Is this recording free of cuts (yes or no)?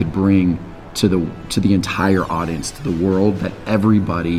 yes